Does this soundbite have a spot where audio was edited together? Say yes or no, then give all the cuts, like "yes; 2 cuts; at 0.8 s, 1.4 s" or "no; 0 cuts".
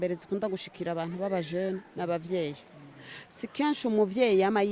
no; 0 cuts